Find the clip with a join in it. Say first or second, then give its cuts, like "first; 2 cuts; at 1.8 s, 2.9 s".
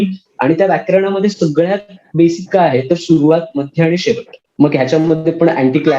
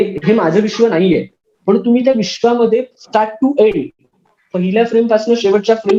first; 1 cut; at 4.4 s